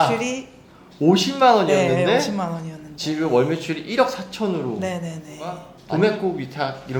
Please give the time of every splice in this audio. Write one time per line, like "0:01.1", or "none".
0:05.7